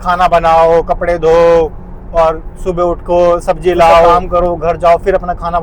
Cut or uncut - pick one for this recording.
cut